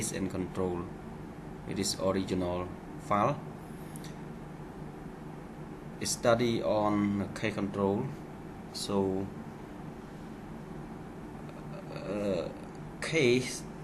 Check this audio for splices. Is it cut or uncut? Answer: cut